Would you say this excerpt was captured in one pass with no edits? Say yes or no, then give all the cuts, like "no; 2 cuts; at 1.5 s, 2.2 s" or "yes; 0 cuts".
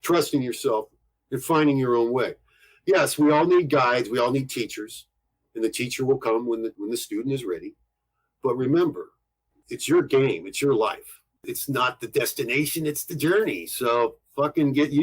no; 2 cuts; at 6.8 s, 11.5 s